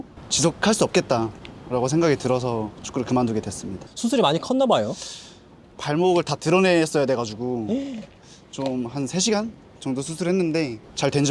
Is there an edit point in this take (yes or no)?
no